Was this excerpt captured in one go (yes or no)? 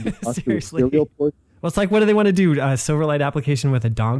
no